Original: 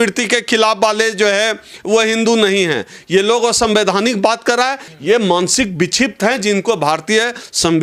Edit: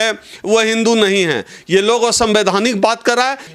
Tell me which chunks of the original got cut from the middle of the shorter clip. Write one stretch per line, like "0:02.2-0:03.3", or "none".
none